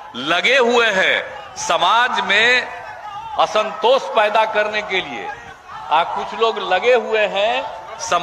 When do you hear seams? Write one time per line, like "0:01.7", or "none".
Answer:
none